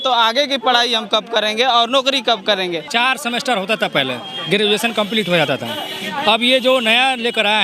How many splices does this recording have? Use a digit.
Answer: 1